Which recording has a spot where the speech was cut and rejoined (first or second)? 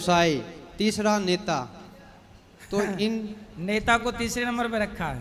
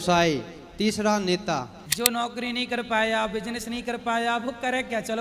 second